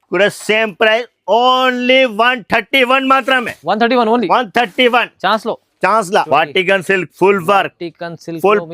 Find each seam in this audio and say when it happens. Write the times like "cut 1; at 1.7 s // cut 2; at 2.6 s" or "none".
cut 1; at 6.3 s